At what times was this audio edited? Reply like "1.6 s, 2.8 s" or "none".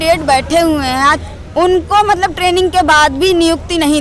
1.2 s